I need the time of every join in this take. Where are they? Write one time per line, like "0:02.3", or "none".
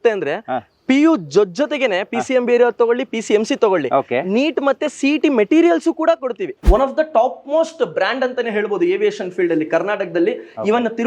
0:06.5